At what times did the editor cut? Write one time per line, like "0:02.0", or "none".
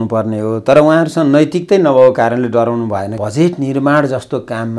0:03.2